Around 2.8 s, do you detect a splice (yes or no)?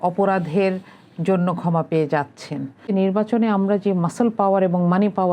yes